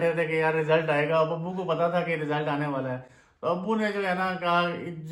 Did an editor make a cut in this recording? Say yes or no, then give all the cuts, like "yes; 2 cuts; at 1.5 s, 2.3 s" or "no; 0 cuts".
no; 0 cuts